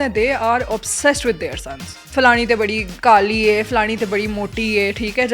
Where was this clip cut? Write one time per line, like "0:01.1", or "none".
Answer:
0:01.9
0:02.9